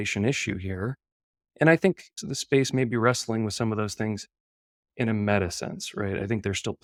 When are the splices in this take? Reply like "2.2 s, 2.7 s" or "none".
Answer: none